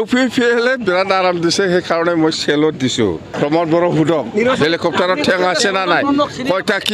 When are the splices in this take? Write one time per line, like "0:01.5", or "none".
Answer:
0:03.3